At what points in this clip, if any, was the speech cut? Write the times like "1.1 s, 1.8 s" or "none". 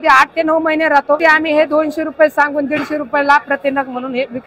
1.2 s